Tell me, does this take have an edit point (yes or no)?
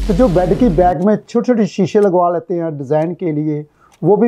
no